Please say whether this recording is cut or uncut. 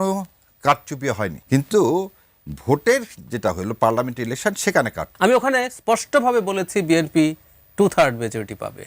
cut